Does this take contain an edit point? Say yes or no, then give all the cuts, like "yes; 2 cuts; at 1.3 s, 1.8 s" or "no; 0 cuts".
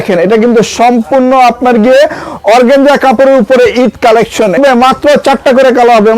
yes; 1 cut; at 4.6 s